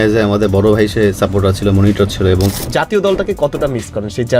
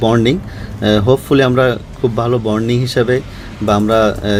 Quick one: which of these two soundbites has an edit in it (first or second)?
first